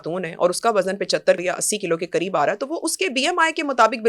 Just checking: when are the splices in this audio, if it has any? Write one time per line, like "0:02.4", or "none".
0:01.4